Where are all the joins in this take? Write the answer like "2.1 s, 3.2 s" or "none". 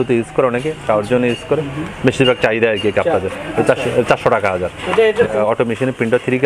5.4 s

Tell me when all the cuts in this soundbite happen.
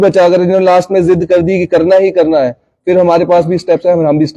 none

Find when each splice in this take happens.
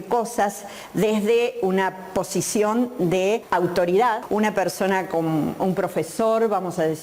3.4 s, 4.2 s

